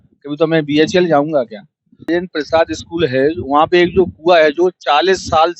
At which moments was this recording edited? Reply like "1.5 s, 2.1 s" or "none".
2.1 s